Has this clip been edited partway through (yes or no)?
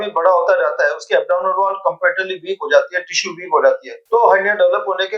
no